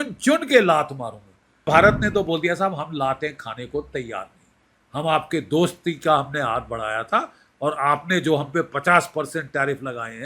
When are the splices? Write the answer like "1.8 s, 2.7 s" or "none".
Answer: 1.7 s